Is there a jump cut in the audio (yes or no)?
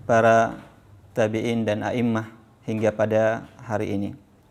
no